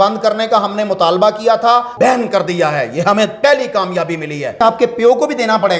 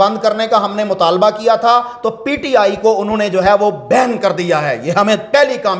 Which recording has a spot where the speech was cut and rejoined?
first; 2 cuts; at 1.9 s, 4.6 s

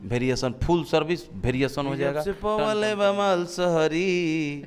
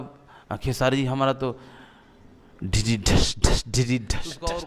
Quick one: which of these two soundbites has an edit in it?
first; 1 cut; at 2.3 s

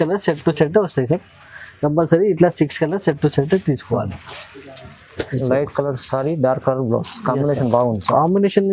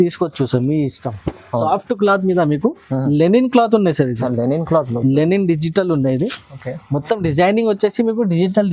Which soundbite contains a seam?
second; 1 cut; at 1.6 s

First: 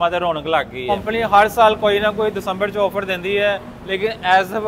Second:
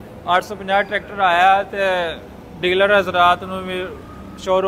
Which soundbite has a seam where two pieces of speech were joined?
first; 1 cut; at 0.9 s

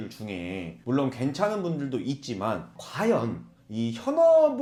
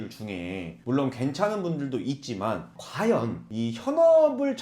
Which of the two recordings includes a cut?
second; 1 cut; at 3.4 s

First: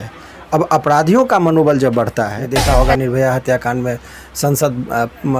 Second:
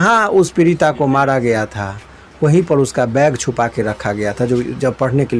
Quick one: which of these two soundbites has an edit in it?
first; 1 cut; at 2.4 s

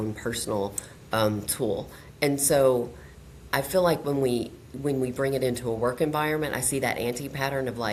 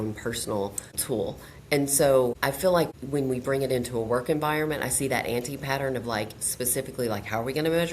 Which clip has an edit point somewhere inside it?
second; 2 cuts; at 1.0 s, 2.9 s

